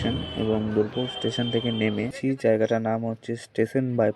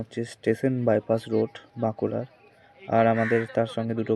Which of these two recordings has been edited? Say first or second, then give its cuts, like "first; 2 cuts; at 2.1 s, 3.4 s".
first; 1 cut; at 2.2 s